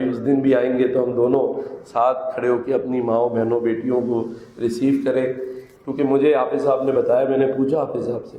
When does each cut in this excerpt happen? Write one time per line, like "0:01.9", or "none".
none